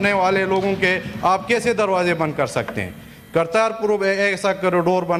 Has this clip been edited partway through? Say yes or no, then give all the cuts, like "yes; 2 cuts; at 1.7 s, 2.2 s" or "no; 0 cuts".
no; 0 cuts